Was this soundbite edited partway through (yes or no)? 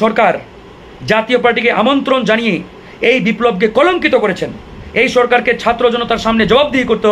no